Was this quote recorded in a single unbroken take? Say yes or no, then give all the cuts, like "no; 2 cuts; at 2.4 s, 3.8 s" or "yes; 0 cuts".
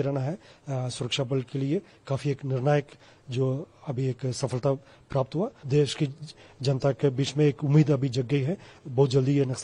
no; 1 cut; at 5.6 s